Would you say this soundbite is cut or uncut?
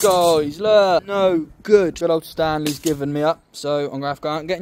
cut